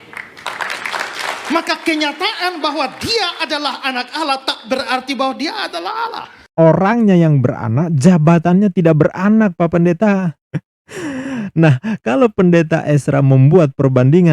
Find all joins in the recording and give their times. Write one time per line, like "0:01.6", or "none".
0:06.5